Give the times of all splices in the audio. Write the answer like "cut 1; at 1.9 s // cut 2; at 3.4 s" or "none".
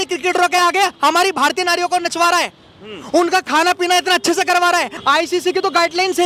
cut 1; at 4.9 s